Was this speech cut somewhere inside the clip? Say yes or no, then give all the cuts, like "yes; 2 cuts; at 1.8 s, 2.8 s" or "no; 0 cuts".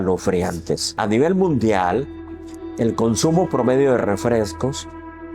yes; 1 cut; at 1.0 s